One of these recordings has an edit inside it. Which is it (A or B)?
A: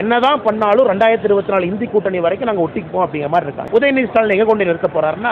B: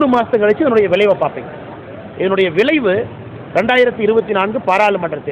A